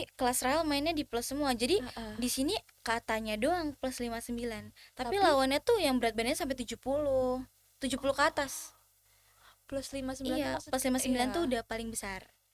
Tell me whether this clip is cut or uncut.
uncut